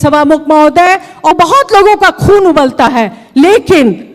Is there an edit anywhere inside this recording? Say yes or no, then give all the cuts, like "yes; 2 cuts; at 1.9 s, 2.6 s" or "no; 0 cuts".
yes; 1 cut; at 1.3 s